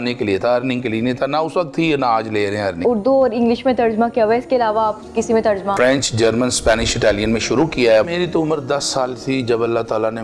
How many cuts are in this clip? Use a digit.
3